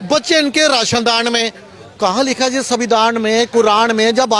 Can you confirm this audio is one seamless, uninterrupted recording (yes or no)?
yes